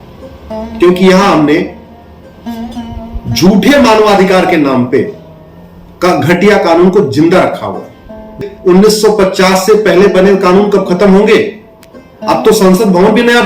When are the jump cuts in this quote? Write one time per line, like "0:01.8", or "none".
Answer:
0:08.4